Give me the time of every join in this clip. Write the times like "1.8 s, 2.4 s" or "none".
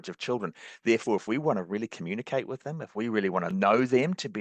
3.5 s

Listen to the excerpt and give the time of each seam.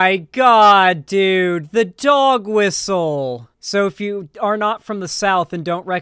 3.5 s

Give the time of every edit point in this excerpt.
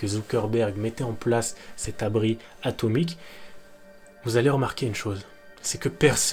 none

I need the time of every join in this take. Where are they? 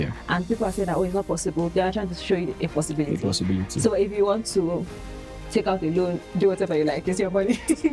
none

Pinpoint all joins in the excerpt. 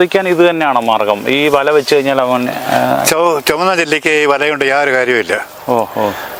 none

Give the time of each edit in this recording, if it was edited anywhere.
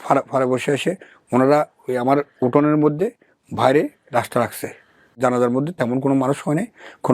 5.1 s

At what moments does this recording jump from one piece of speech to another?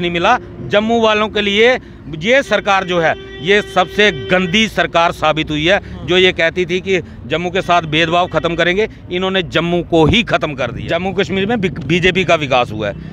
10.8 s

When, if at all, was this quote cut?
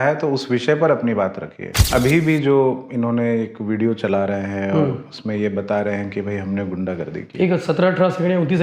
1.7 s

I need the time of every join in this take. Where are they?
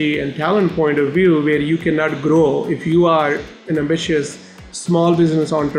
none

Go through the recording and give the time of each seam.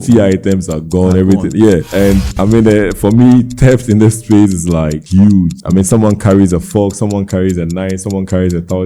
1.9 s, 5.0 s, 5.6 s

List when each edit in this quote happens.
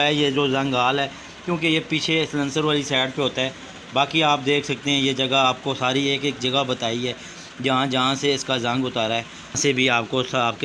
9.6 s

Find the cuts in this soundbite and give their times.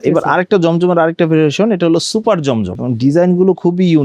2.8 s

